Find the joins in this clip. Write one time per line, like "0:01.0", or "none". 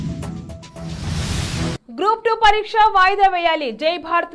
0:01.8